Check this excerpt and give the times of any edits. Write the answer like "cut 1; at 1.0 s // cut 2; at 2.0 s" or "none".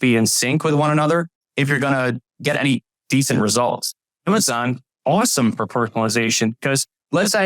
cut 1; at 2.4 s // cut 2; at 4.2 s